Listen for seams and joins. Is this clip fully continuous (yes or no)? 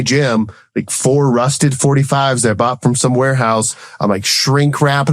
yes